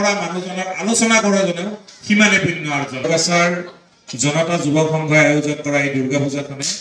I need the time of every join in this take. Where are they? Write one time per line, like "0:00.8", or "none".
0:03.1